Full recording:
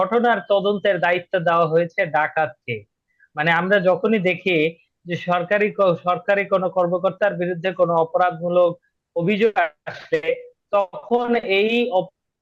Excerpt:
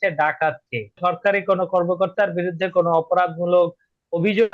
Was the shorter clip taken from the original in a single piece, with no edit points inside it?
no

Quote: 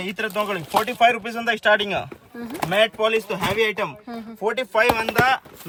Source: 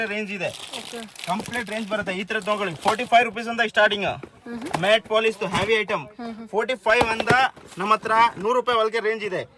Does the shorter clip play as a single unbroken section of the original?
yes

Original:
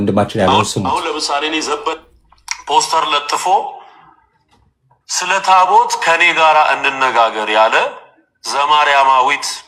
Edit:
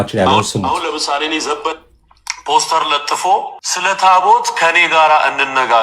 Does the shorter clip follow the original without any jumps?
no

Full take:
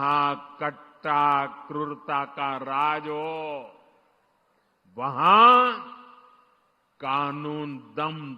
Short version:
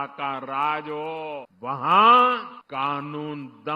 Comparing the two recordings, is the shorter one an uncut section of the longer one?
no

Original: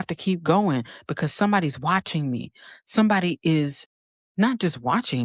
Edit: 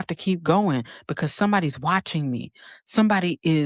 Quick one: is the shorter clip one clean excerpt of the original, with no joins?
yes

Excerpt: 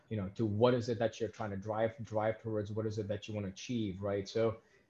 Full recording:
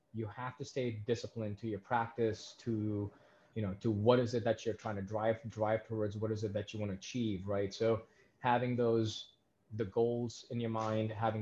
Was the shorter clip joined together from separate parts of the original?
no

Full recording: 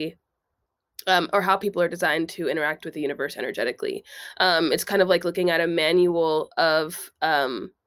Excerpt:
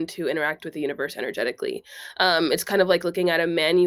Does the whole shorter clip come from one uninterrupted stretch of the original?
yes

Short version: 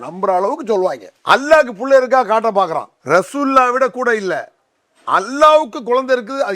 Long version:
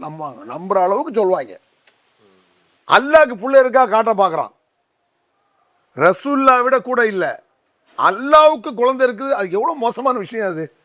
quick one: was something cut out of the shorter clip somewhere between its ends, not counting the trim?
yes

